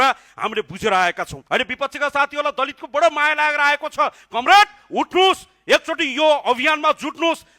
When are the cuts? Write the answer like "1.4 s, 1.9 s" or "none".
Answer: 1.3 s